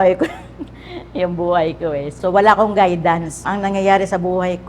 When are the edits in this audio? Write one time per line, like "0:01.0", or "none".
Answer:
0:02.1
0:03.4